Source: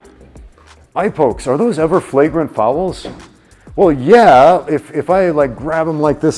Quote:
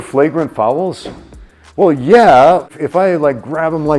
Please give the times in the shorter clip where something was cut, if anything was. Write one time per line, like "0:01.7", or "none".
0:02.7